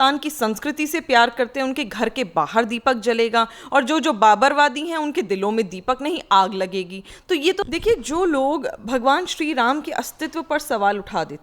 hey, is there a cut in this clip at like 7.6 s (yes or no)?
yes